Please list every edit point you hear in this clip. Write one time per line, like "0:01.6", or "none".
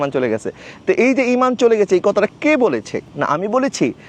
0:03.0

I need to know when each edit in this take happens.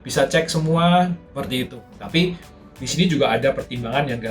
0:01.7

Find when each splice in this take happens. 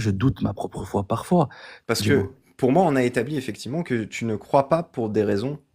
0:01.7

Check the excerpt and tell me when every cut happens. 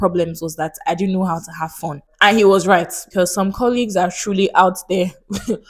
0:02.0
0:03.1

